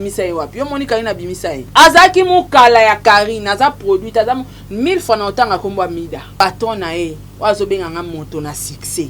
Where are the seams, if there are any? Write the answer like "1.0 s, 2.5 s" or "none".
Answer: 1.6 s, 6.4 s